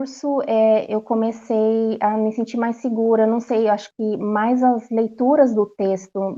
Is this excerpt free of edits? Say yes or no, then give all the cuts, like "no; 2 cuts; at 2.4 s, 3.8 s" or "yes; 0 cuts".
yes; 0 cuts